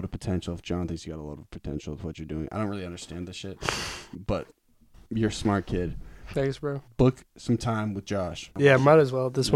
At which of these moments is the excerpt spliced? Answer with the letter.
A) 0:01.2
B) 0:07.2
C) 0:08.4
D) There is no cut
C